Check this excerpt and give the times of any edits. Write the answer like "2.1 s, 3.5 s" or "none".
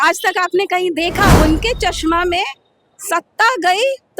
1.3 s